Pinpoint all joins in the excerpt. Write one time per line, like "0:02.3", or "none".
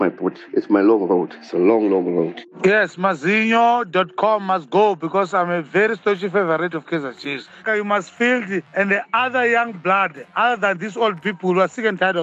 0:07.6
0:08.6